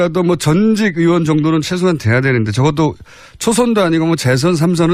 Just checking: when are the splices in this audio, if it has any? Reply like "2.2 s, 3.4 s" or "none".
none